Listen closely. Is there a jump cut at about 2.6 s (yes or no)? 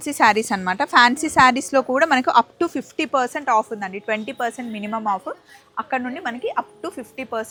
no